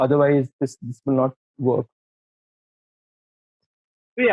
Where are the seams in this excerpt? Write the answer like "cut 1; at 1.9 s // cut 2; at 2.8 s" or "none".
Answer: none